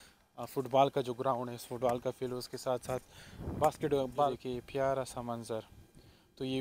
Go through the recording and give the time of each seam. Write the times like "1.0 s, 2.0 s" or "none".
4.3 s